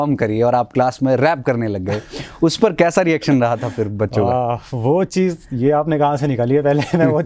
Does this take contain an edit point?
no; 0 cuts

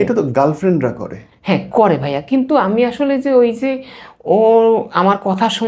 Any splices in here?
no; 0 cuts

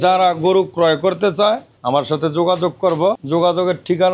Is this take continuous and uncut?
no; 2 cuts; at 1.7 s, 3.2 s

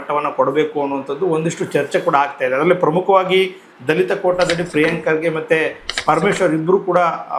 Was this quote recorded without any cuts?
yes; 0 cuts

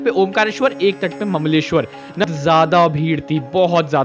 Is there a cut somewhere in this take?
yes; 1 cut; at 2.2 s

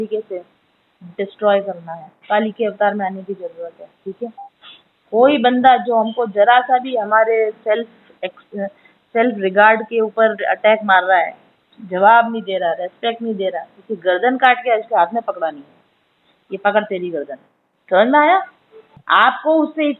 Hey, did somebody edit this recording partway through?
yes; 1 cut; at 19.0 s

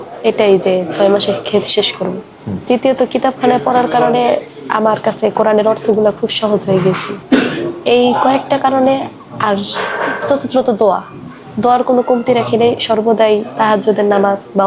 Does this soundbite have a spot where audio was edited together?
no; 0 cuts

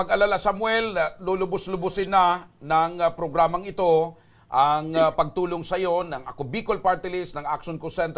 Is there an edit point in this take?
no; 0 cuts

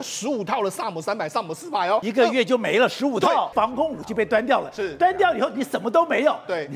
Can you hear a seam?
yes; 2 cuts; at 2.1 s, 3.5 s

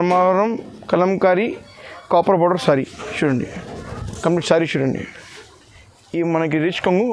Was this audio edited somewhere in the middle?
no; 0 cuts

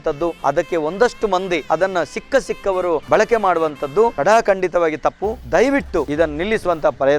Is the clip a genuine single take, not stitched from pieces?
yes; 0 cuts

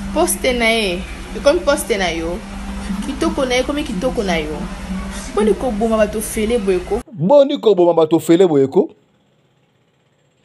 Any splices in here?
yes; 1 cut; at 6.9 s

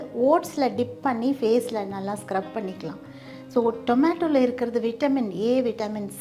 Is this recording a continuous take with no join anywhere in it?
yes; 0 cuts

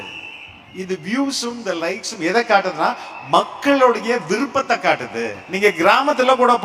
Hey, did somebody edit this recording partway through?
yes; 1 cut; at 5.4 s

